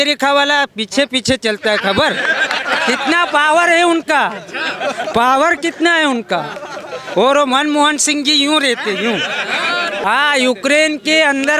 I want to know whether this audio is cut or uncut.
cut